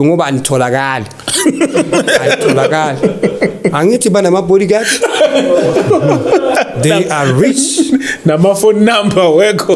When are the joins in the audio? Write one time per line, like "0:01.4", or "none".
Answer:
none